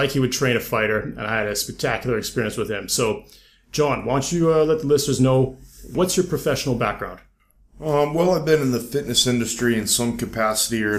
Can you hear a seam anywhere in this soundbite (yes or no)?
yes